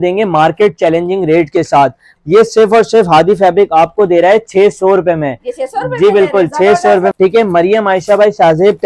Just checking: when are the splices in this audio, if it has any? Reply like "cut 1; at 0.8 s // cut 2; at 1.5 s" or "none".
cut 1; at 2.1 s // cut 2; at 7.1 s